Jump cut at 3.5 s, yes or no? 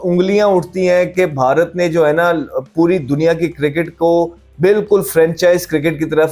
no